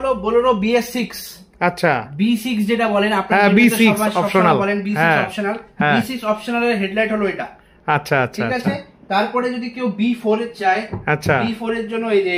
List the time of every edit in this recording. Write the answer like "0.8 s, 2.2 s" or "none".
none